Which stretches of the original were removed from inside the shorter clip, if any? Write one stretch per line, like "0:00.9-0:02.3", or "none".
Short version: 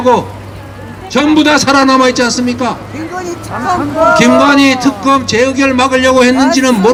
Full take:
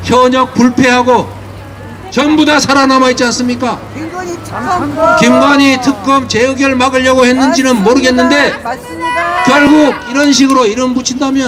none